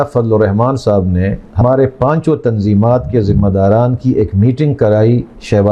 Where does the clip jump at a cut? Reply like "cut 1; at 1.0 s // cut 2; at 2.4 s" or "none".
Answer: cut 1; at 1.6 s